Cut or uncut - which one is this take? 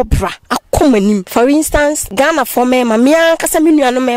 cut